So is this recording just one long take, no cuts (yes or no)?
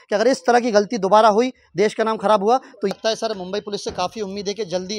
no